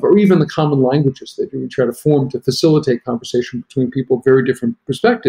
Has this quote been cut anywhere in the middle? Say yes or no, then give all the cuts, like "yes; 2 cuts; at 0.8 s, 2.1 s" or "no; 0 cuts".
no; 0 cuts